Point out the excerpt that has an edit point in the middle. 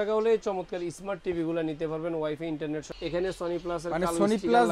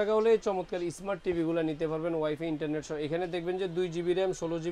first; 1 cut; at 2.9 s

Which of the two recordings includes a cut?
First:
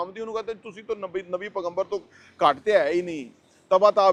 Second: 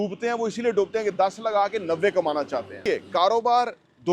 second; 1 cut; at 2.8 s

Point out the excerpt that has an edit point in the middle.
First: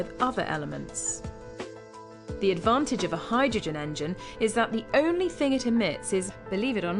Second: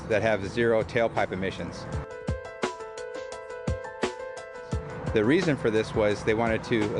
second; 1 cut; at 4.7 s

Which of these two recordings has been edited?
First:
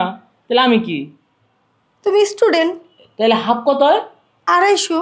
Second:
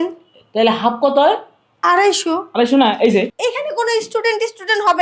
second; 1 cut; at 3.3 s

